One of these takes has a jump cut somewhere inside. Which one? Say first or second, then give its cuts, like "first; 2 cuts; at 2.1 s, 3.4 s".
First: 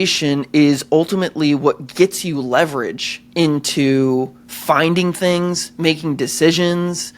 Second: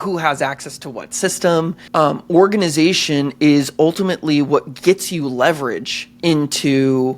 second; 1 cut; at 1.8 s